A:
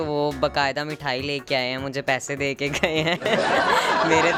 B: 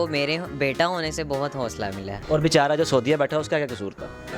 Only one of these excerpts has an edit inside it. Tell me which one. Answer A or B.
B